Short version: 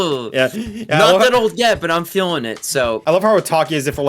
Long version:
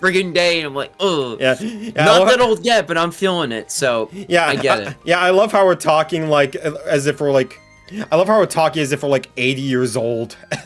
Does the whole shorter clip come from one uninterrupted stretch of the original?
no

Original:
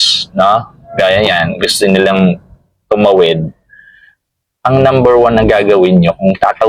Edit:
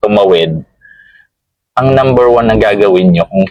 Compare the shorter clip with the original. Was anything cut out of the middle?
no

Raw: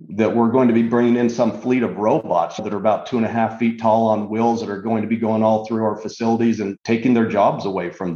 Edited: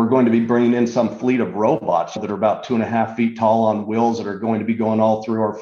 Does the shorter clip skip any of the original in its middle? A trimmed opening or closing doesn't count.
no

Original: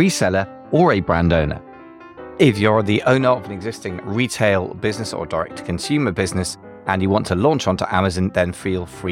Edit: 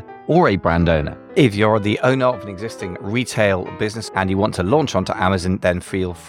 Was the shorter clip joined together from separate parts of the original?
yes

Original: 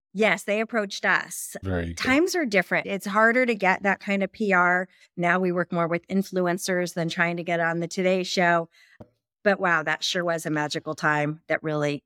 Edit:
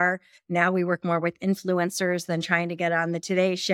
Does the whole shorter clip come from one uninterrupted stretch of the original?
yes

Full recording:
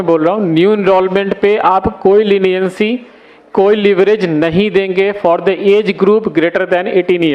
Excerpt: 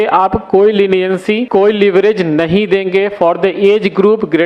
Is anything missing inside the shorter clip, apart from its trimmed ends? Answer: yes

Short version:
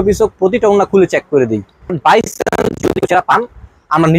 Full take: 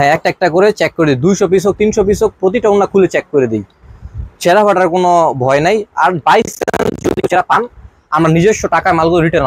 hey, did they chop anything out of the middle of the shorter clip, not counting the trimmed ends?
yes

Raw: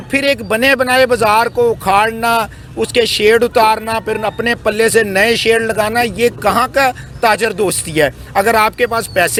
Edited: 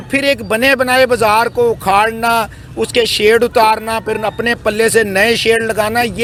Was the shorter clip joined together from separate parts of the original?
no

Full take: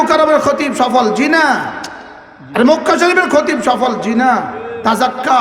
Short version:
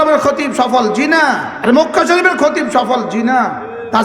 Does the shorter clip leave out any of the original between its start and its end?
yes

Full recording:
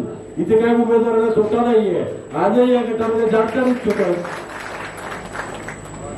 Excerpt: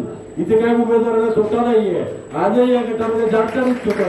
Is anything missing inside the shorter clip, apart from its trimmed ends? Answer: no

